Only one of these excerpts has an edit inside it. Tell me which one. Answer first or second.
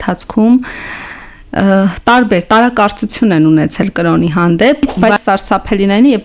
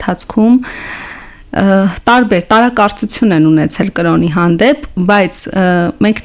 first